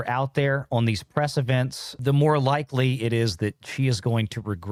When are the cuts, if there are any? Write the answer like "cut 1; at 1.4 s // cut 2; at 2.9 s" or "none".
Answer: none